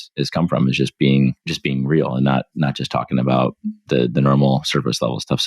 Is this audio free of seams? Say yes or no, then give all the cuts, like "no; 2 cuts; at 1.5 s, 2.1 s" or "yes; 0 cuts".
no; 1 cut; at 1.5 s